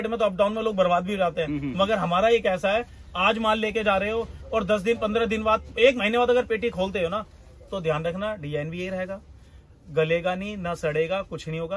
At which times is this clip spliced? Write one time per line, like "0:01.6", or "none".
none